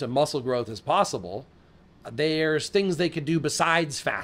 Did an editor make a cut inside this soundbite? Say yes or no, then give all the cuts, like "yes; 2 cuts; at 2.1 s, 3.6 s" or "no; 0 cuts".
no; 0 cuts